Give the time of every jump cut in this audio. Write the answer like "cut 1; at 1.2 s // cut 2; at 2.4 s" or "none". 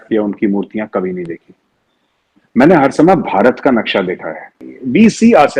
cut 1; at 4.7 s

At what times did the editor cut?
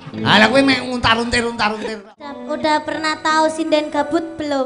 cut 1; at 2.4 s

